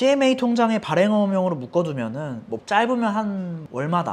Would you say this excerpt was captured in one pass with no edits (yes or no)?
yes